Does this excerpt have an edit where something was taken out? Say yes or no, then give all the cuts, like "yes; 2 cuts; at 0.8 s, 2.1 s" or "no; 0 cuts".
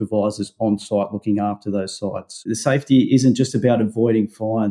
yes; 1 cut; at 2.4 s